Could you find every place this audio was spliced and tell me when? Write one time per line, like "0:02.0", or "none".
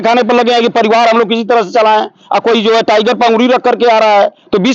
none